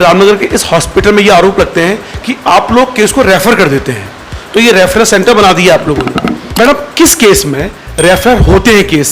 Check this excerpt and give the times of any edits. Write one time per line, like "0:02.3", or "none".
0:06.4